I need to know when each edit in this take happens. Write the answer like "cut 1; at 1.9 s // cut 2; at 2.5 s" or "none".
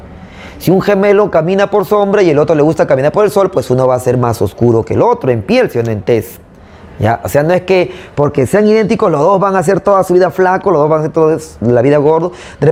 none